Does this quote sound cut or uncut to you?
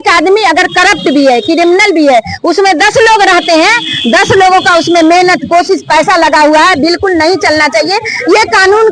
uncut